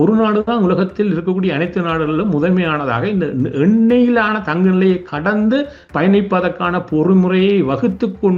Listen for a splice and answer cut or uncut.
uncut